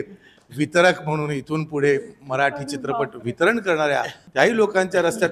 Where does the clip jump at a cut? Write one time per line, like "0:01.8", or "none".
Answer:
0:04.2

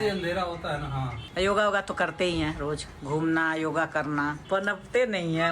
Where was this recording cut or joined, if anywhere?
0:01.2

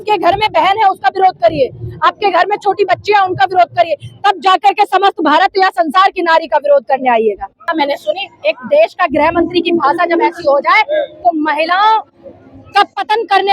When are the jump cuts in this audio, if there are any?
0:07.6

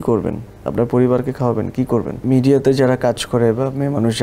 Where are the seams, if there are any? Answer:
0:02.1

